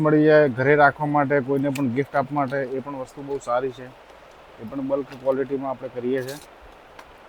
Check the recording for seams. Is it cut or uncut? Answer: uncut